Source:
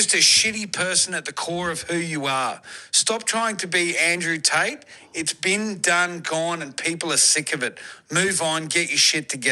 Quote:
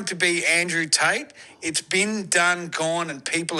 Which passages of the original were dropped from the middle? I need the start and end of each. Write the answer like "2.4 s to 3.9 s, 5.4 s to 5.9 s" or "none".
none